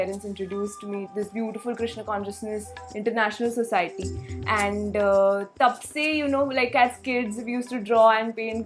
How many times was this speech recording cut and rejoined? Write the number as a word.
one